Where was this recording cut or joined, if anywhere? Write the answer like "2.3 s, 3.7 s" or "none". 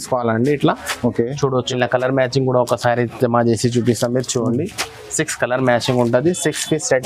1.7 s